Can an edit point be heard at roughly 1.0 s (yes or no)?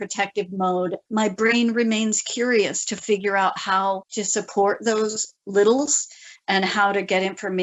yes